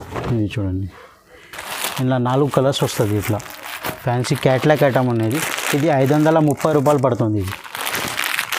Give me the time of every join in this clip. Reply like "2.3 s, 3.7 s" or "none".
none